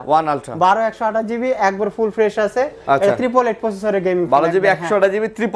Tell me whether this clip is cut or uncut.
uncut